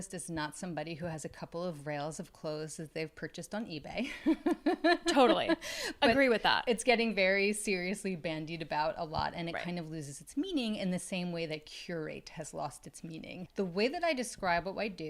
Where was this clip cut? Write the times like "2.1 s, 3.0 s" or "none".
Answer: none